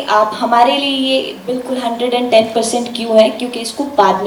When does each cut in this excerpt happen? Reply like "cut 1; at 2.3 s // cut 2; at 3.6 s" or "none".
none